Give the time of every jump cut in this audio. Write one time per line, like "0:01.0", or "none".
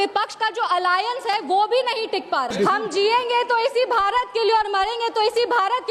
0:02.5

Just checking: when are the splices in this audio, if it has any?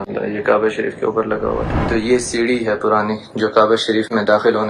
0:01.7

